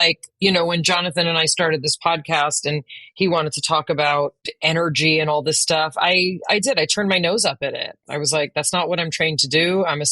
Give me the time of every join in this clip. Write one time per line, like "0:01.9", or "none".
0:04.5